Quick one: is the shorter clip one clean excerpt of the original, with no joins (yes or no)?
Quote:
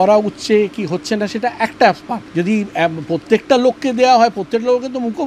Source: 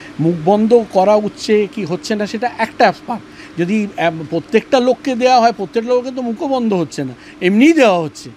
no